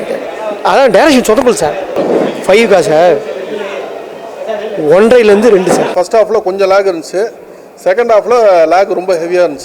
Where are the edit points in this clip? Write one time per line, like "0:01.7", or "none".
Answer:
0:01.9
0:05.9